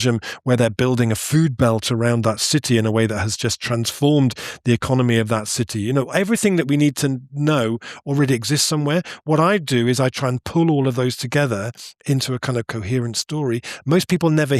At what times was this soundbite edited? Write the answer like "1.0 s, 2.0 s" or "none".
none